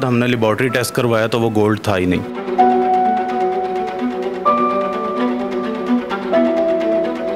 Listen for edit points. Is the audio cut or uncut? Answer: uncut